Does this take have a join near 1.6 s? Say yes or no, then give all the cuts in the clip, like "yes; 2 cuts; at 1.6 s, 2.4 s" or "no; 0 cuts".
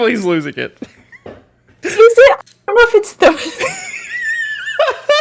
yes; 1 cut; at 1.6 s